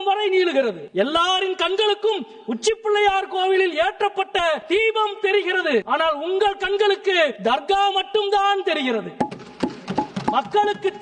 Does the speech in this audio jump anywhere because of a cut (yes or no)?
yes